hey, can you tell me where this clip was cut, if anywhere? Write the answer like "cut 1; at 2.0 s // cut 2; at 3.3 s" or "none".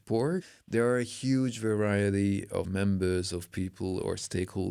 cut 1; at 2.7 s